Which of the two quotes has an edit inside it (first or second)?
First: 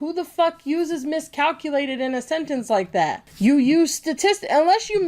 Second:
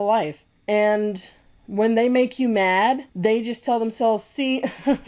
first